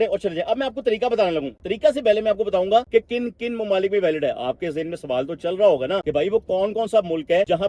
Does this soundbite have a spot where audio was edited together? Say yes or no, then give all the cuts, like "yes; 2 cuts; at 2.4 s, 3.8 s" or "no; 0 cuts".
no; 0 cuts